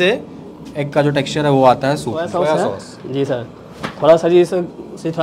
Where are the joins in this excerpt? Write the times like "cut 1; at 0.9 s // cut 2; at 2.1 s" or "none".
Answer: none

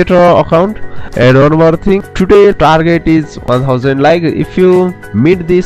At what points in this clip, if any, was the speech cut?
none

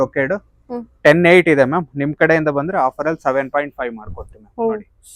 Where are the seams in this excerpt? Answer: none

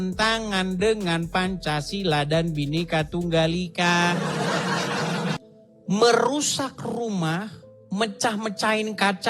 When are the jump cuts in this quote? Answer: cut 1; at 5.4 s

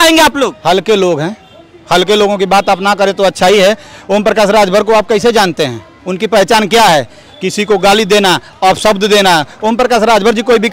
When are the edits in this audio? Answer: none

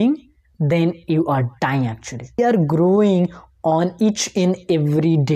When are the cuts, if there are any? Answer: cut 1; at 2.4 s

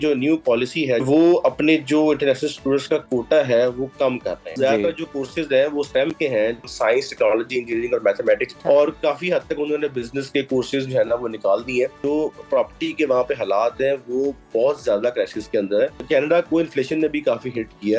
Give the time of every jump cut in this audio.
cut 1; at 1.0 s // cut 2; at 4.5 s // cut 3; at 6.7 s // cut 4; at 8.5 s // cut 5; at 12.0 s // cut 6; at 16.0 s

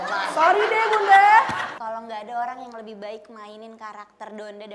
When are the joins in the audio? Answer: cut 1; at 1.7 s

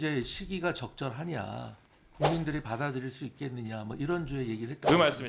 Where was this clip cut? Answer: none

